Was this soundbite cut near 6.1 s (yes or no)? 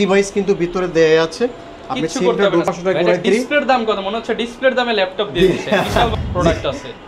yes